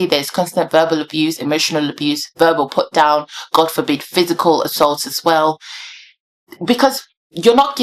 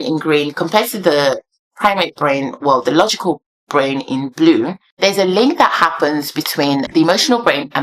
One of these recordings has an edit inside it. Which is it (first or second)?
second